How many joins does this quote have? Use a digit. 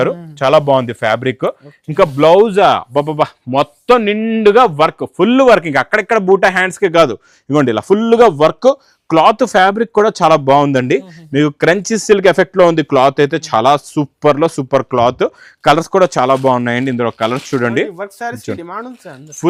0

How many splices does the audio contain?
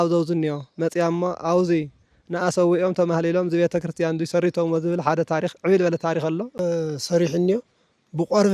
1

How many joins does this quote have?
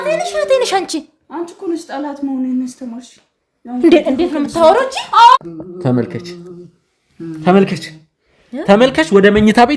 1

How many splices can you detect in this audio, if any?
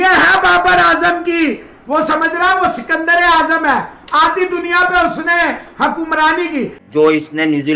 1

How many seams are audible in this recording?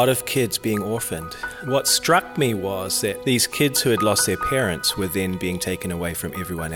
1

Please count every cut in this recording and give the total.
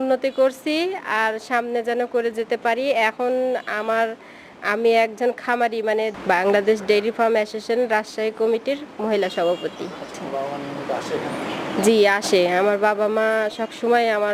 0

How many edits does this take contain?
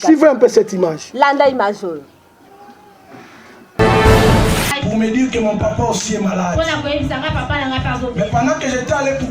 1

